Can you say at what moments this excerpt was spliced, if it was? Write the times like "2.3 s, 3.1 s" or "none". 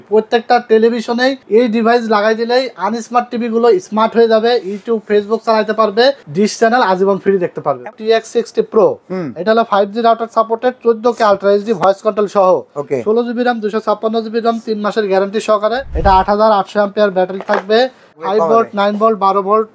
1.4 s, 6.2 s, 7.8 s, 15.9 s, 18.2 s